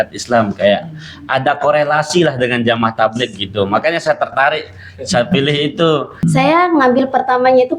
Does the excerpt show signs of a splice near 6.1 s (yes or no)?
yes